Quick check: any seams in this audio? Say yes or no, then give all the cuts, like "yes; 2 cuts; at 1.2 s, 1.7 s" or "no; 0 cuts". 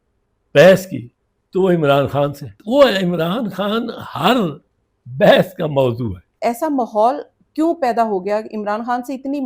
yes; 2 cuts; at 2.6 s, 6.2 s